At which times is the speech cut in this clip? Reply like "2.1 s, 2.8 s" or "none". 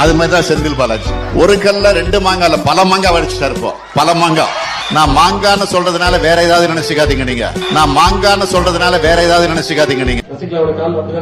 none